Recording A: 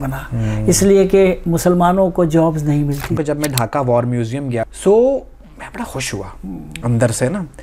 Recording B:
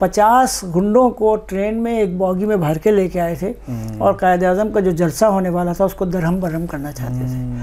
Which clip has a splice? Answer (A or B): A